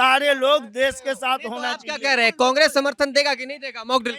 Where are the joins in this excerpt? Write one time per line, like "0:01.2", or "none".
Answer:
none